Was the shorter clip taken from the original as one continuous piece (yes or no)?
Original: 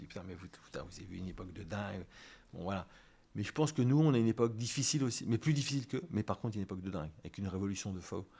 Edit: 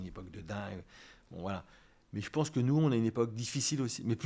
yes